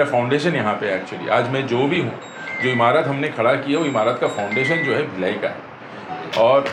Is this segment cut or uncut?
uncut